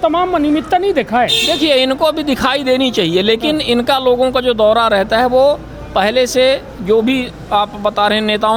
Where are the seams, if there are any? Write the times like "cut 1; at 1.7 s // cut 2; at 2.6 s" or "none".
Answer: none

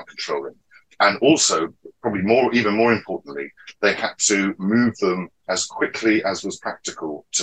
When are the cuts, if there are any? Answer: none

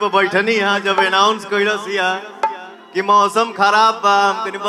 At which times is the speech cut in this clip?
none

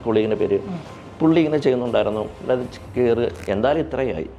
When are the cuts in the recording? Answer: cut 1; at 3.4 s

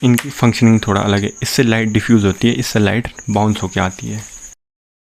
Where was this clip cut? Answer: none

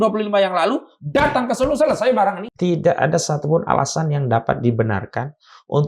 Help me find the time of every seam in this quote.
cut 1; at 2.4 s

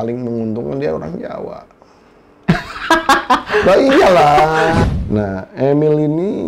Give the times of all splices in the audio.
cut 1; at 4.8 s

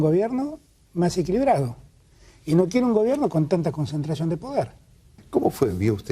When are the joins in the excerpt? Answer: cut 1; at 5.2 s

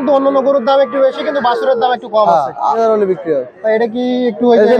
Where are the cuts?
cut 1; at 2.8 s

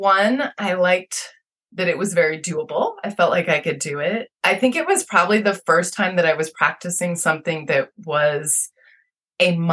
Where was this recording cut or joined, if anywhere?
none

